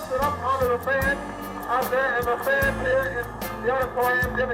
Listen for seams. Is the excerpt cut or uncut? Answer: uncut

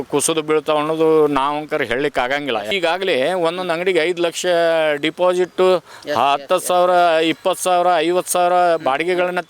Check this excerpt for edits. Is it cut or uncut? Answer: cut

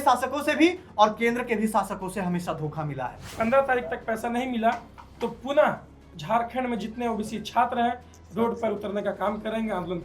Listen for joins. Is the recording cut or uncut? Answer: cut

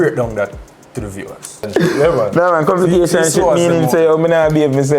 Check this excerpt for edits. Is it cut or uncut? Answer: cut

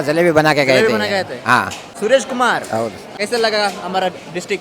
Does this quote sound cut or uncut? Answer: cut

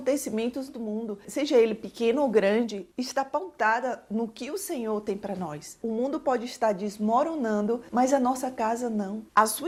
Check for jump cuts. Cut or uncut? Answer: uncut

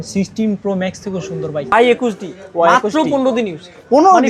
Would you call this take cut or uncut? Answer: cut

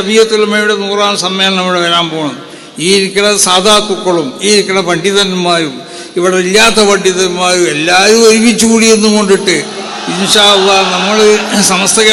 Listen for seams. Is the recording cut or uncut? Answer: uncut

